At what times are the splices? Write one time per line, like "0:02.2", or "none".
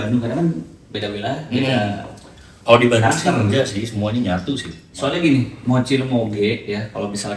0:04.8